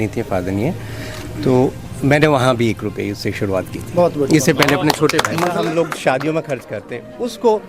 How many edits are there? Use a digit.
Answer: 1